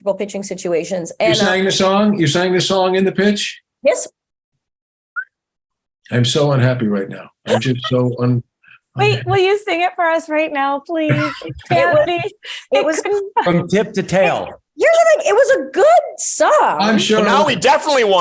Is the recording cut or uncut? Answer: uncut